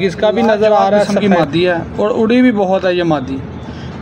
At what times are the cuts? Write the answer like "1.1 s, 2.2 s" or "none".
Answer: 1.1 s